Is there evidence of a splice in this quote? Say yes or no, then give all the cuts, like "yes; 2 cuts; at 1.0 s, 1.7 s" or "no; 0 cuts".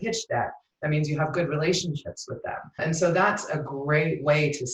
yes; 1 cut; at 2.8 s